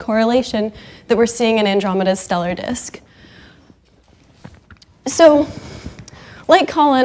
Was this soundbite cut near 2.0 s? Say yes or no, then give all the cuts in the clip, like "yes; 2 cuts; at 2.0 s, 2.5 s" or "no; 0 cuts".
yes; 1 cut; at 2.0 s